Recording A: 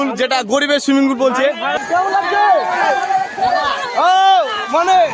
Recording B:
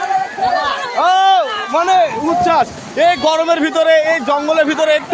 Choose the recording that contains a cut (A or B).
A